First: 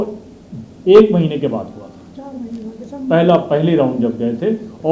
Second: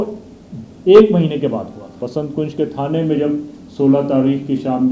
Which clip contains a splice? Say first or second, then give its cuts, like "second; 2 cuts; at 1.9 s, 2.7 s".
second; 1 cut; at 1.8 s